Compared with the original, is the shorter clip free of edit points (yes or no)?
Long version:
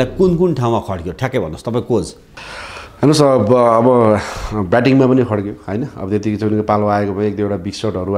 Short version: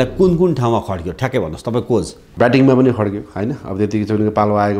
no